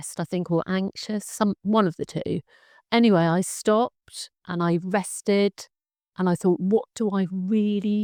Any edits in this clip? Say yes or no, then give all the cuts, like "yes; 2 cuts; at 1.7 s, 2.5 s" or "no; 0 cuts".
no; 0 cuts